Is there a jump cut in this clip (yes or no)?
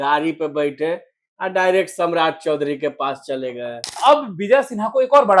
yes